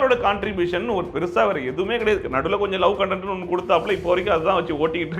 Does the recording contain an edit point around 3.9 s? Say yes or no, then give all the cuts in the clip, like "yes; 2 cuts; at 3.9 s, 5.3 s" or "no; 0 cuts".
no; 0 cuts